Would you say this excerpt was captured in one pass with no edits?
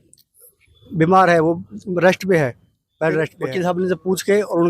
no; 1 cut; at 3.4 s

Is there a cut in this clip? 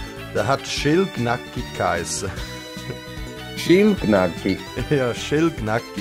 no; 0 cuts

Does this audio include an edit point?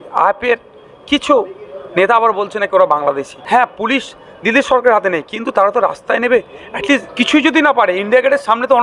yes; 2 cuts; at 3.3 s, 7.1 s

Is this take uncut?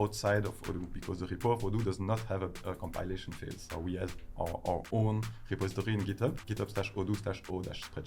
no; 2 cuts; at 3.7 s, 6.4 s

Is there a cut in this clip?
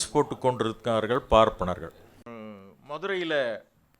yes; 1 cut; at 2.3 s

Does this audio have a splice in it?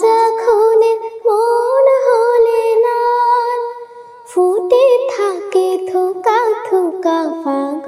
no; 0 cuts

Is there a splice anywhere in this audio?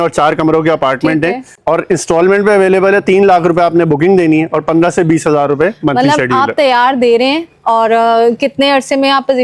yes; 1 cut; at 1.5 s

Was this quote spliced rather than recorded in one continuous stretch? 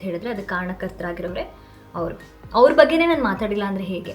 no; 0 cuts

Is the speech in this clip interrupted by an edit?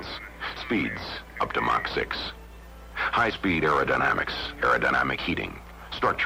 no; 0 cuts

